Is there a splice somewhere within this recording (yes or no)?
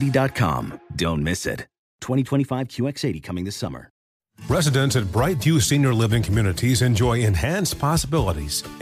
yes